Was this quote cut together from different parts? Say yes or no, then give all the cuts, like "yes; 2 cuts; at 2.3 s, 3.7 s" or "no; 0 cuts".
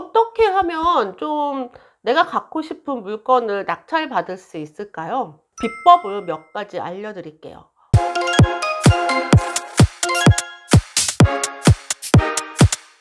no; 0 cuts